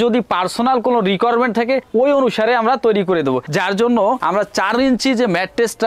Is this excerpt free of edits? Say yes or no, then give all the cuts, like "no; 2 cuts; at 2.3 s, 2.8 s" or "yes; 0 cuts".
yes; 0 cuts